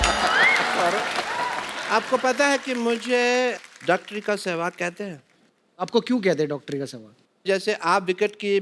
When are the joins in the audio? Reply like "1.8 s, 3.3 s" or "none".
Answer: 1.7 s